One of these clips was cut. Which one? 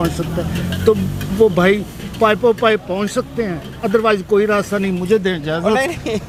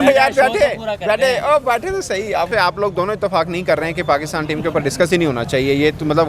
second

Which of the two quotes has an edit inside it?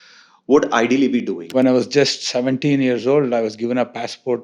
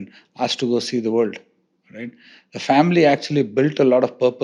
first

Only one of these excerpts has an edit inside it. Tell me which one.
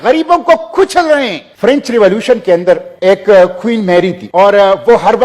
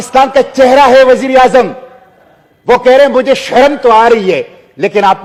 first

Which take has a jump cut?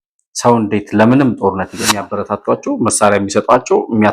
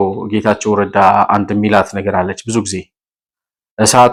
first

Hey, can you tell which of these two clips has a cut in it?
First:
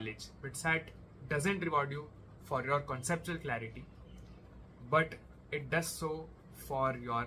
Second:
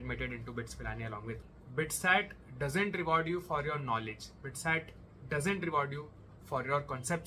second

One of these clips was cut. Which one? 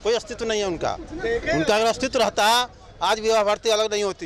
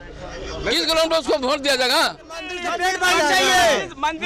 second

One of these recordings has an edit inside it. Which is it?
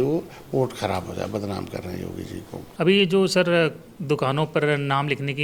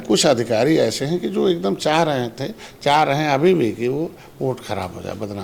first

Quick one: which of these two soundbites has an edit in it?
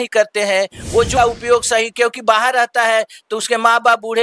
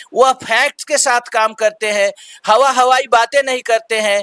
first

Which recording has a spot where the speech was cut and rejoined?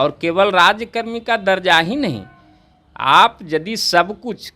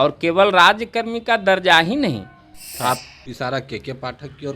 second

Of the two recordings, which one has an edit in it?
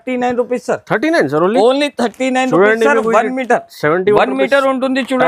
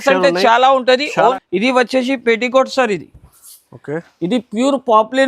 second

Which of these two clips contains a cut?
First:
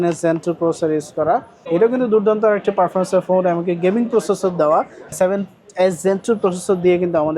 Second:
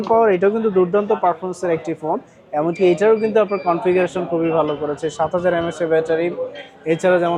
first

